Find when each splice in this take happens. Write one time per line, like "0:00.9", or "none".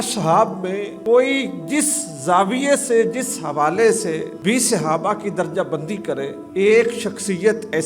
0:00.9
0:04.3
0:06.4